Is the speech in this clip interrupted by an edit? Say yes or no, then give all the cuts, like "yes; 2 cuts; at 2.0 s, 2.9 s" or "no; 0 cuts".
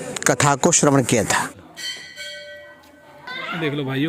yes; 1 cut; at 1.5 s